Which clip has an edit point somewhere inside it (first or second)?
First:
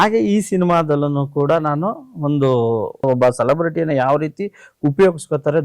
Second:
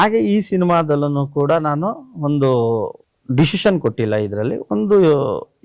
first